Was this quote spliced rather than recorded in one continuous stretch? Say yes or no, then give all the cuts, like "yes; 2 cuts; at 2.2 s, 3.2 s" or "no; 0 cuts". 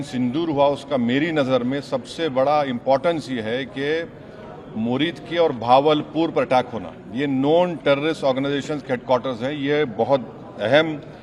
no; 0 cuts